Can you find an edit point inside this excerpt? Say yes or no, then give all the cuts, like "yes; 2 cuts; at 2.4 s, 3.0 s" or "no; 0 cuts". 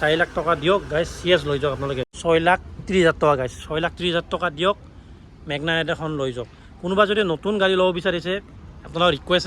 yes; 1 cut; at 2.1 s